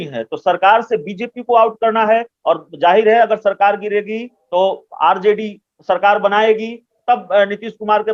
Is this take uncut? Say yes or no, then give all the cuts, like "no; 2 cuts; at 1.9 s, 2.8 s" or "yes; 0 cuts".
yes; 0 cuts